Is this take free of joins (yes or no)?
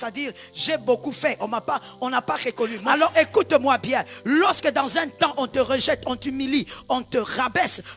no